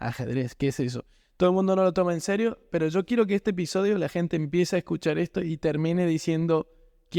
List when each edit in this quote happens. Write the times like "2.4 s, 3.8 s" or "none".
none